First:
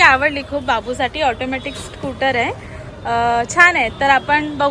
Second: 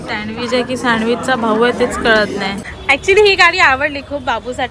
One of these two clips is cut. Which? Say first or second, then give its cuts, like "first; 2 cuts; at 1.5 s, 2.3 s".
second; 1 cut; at 2.7 s